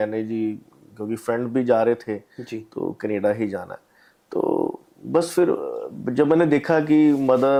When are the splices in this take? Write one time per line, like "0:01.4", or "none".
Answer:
none